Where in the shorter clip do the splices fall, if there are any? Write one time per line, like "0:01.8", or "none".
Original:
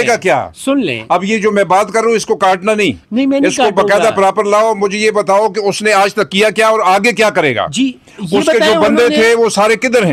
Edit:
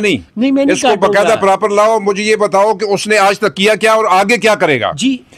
none